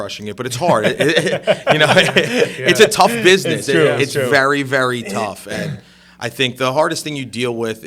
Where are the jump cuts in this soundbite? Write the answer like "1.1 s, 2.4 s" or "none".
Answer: none